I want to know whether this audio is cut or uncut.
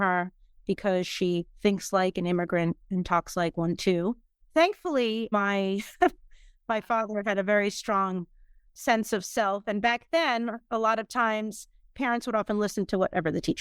uncut